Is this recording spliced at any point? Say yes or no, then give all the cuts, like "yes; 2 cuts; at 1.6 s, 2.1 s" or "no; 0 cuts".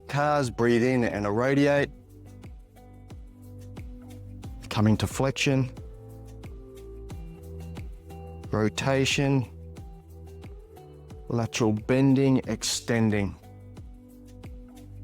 yes; 7 cuts; at 1.9 s, 4.6 s, 6.3 s, 8.5 s, 9.5 s, 11.2 s, 14.0 s